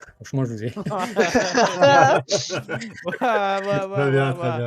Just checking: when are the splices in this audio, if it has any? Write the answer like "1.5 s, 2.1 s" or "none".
none